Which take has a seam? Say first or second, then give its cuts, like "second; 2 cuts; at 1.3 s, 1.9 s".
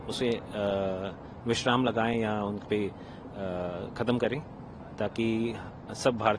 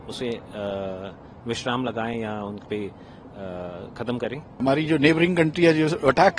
second; 1 cut; at 4.6 s